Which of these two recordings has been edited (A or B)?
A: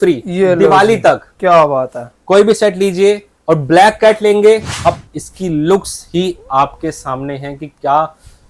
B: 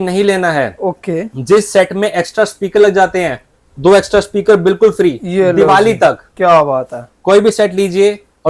A